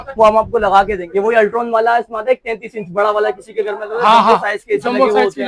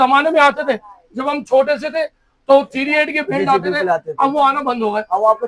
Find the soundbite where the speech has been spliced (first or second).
first